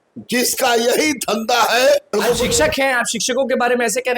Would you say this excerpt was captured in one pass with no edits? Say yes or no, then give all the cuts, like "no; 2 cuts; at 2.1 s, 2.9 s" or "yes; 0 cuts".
no; 1 cut; at 2.1 s